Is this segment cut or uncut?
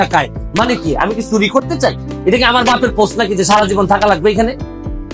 cut